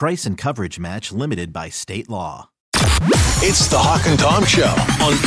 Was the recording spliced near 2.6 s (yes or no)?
yes